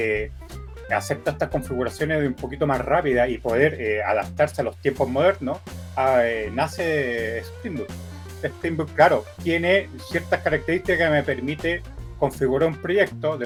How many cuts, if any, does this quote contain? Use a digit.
0